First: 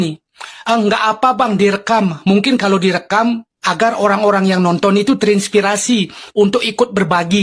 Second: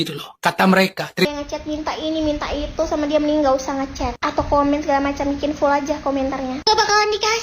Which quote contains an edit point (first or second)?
second